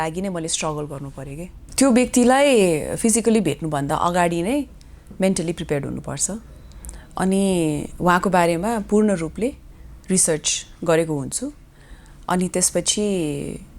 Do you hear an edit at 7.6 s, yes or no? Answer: no